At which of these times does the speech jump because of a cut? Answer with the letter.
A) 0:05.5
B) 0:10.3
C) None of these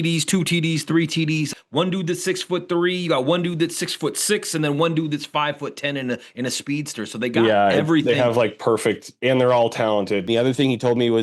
B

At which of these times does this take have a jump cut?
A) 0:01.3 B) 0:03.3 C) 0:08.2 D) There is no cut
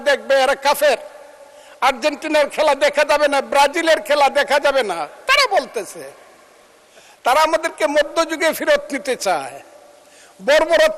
D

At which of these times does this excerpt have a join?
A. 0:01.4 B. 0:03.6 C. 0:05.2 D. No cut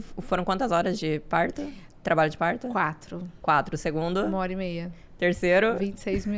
D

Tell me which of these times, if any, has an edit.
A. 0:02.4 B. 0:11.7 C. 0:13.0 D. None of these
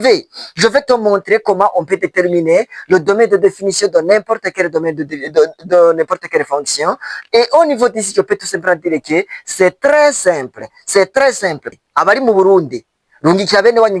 B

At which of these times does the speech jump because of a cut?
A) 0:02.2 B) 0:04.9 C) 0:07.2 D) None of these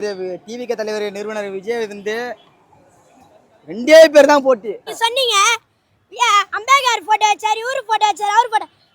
B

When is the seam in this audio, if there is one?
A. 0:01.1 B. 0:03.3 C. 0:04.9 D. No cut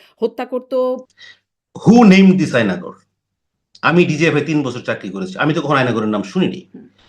A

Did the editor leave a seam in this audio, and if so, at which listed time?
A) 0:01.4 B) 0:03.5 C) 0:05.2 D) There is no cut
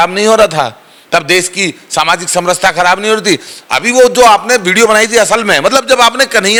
D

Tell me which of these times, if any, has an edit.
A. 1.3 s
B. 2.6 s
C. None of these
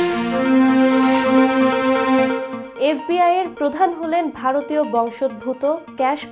C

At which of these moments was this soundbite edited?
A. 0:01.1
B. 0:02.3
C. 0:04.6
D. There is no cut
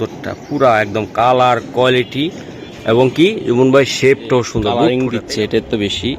C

